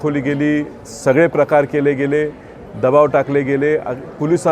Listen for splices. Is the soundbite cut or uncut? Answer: uncut